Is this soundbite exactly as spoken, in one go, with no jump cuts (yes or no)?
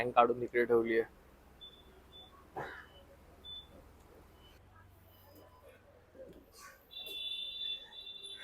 no